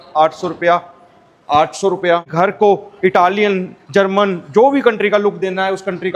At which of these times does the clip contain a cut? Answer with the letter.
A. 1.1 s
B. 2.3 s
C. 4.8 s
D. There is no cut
B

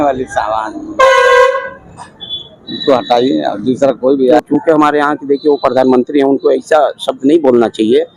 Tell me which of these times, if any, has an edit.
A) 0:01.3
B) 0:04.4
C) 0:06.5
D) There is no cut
B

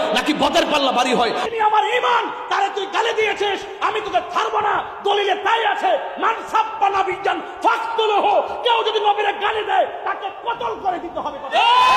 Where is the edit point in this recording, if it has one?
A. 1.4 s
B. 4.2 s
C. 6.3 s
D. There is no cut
A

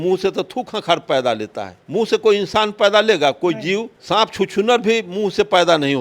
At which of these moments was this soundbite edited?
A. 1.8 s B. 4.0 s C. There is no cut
C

